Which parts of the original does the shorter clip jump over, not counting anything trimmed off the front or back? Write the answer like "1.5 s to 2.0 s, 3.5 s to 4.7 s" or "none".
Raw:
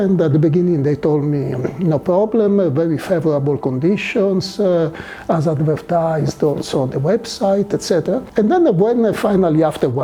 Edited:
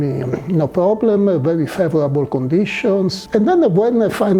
4.5 s to 8.2 s